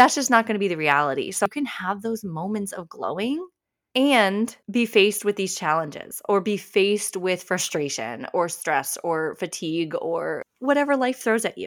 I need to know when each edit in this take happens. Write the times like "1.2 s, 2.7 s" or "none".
1.5 s

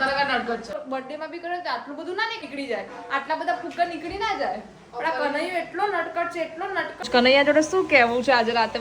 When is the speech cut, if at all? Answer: 0.8 s, 2.4 s, 7.1 s

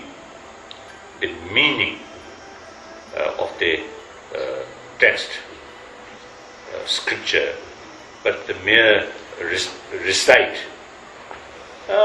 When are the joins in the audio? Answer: 5.5 s

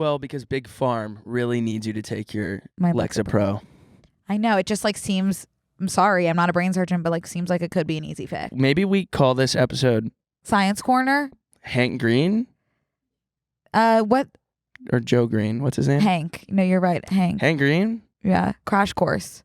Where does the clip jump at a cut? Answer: 8.5 s

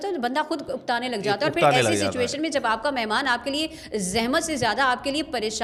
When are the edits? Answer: none

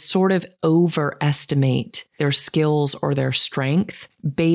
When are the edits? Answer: 2.0 s

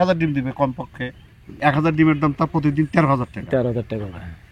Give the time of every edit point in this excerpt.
1.5 s

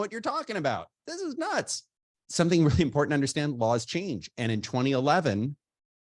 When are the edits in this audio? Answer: 2.2 s

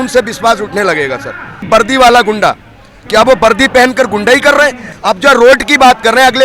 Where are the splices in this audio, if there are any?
1.7 s, 4.9 s

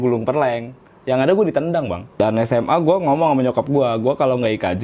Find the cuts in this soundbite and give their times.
2.1 s

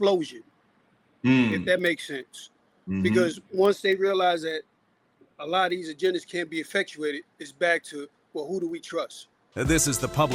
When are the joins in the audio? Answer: 9.4 s

